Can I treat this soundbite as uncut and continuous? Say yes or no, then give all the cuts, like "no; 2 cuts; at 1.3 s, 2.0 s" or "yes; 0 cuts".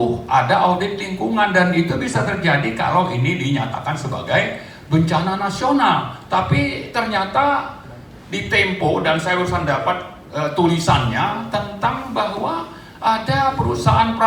yes; 0 cuts